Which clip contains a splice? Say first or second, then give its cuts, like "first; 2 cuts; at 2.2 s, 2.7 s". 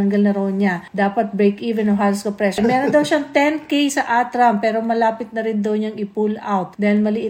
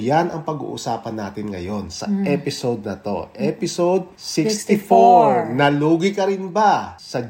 first; 1 cut; at 2.6 s